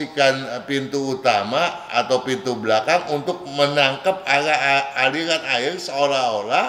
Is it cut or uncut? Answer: uncut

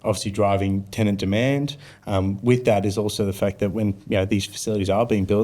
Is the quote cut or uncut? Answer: uncut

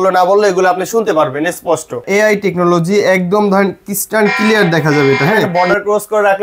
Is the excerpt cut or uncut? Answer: cut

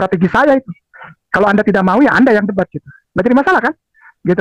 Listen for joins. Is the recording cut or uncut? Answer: uncut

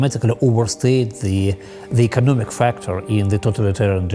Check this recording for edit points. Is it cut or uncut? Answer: uncut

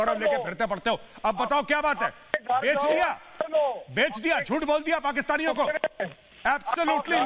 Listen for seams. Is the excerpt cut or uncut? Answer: uncut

